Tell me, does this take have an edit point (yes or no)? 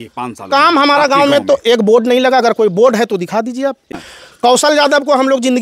yes